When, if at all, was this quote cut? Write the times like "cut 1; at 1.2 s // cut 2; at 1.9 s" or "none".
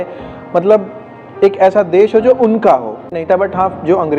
cut 1; at 3.2 s